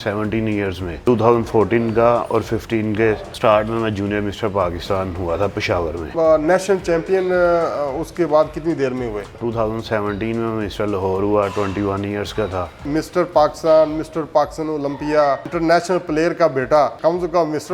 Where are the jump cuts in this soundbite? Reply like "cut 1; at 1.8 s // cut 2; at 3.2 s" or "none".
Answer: cut 1; at 1.0 s // cut 2; at 3.3 s // cut 3; at 6.1 s // cut 4; at 9.4 s // cut 5; at 12.8 s // cut 6; at 15.5 s // cut 7; at 17.0 s